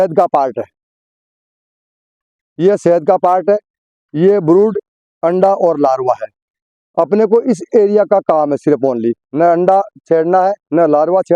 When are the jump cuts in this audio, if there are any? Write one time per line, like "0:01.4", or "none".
none